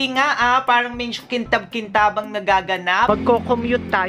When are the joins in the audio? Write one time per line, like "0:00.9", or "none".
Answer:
0:03.1